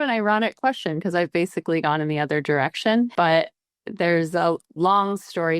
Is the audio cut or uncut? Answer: cut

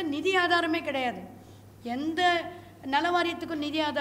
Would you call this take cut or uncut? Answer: uncut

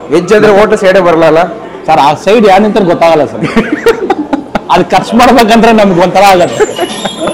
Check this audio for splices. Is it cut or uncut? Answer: uncut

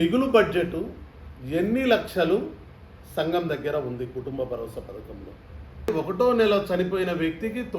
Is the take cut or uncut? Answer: cut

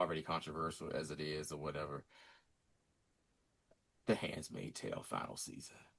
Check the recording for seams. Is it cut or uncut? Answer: uncut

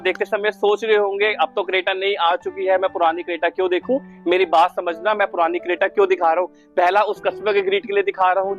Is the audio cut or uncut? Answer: uncut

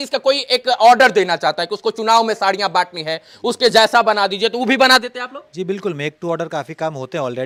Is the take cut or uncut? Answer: uncut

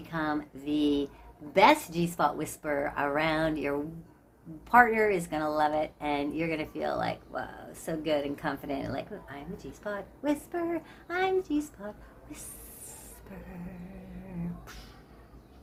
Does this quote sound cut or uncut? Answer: uncut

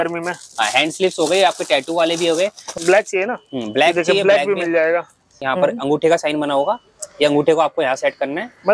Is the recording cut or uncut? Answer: cut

